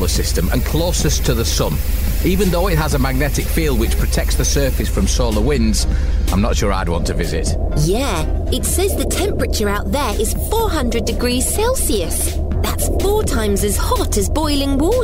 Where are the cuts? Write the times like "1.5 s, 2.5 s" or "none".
none